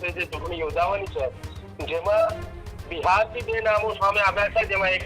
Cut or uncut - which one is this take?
uncut